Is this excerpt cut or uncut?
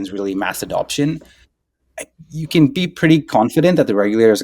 uncut